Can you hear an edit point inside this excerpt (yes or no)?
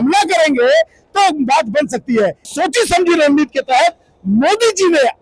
yes